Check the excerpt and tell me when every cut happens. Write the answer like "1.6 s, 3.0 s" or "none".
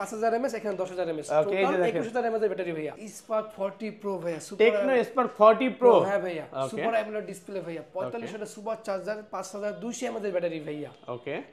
2.9 s